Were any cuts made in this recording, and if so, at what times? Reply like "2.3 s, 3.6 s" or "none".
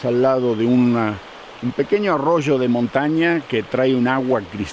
none